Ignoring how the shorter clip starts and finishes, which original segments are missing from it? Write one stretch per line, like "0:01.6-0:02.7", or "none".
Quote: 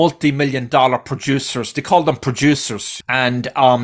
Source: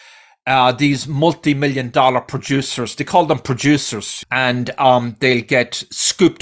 none